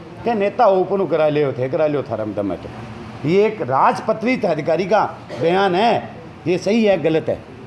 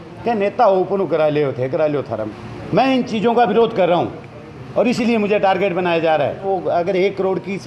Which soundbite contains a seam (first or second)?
second